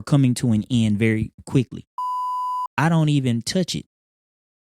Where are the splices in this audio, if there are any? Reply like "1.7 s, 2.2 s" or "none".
2.4 s